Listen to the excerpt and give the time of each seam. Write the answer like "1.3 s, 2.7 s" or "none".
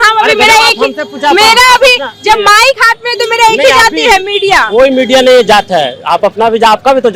none